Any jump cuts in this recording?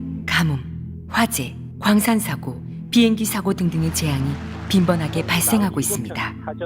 yes; 1 cut; at 5.0 s

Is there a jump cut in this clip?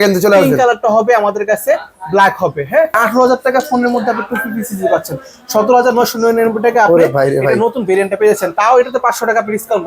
yes; 1 cut; at 3.0 s

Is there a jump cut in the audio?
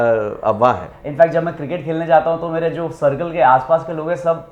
yes; 1 cut; at 1.0 s

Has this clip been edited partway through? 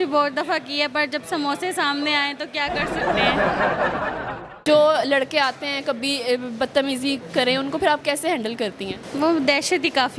yes; 2 cuts; at 4.6 s, 9.0 s

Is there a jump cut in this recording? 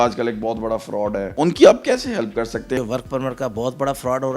yes; 2 cuts; at 1.3 s, 2.8 s

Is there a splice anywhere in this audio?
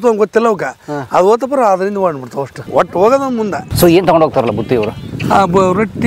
yes; 2 cuts; at 2.6 s, 3.7 s

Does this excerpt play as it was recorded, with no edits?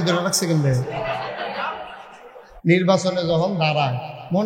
no; 1 cut; at 2.5 s

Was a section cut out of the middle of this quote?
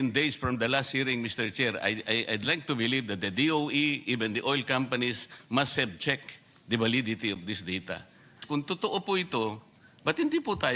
yes; 1 cut; at 8.4 s

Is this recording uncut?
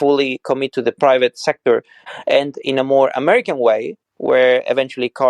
no; 1 cut; at 2.0 s

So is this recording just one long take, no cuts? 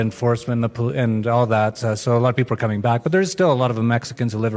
yes; 0 cuts

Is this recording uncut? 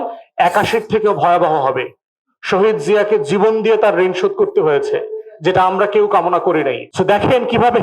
no; 1 cut; at 6.9 s

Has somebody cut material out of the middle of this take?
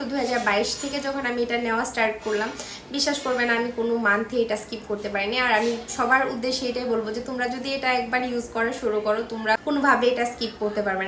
yes; 1 cut; at 9.6 s

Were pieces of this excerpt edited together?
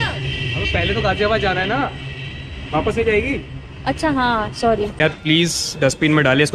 yes; 1 cut; at 5.0 s

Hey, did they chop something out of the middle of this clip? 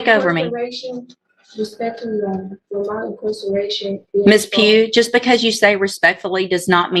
no; 0 cuts

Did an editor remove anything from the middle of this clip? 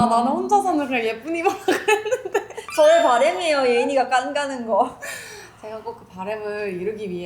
no; 0 cuts

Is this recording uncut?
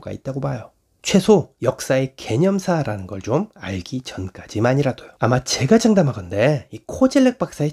no; 1 cut; at 5.1 s

